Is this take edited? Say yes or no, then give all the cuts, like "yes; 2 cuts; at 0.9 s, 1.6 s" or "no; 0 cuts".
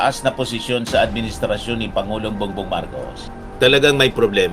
yes; 1 cut; at 3.2 s